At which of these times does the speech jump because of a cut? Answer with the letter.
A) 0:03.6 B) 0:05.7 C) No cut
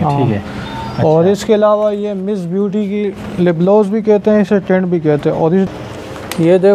B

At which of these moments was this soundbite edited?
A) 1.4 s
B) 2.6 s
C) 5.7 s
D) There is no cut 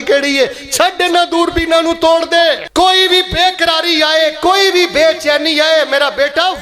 B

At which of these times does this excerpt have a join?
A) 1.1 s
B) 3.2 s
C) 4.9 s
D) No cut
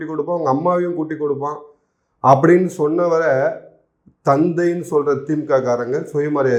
D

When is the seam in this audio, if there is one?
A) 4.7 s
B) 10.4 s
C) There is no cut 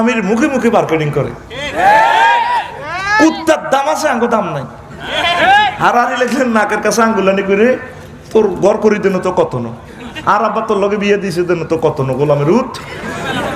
C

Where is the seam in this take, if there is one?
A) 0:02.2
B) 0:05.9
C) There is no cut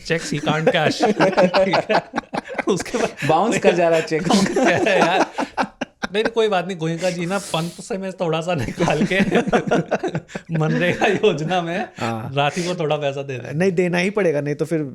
C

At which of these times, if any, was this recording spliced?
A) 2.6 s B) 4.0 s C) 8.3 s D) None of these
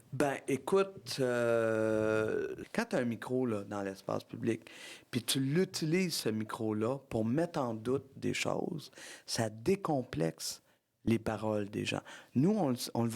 A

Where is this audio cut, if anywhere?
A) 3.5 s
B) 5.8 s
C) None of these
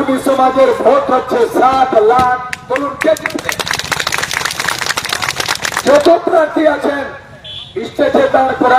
B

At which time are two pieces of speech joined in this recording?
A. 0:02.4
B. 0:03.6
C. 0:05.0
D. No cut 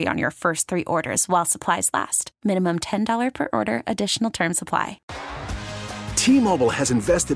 C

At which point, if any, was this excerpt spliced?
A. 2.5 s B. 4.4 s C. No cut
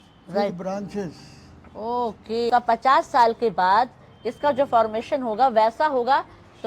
A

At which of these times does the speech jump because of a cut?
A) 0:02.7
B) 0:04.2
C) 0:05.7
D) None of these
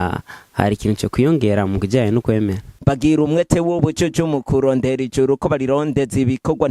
A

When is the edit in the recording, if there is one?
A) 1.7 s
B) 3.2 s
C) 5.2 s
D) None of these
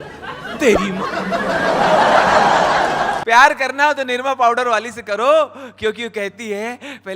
B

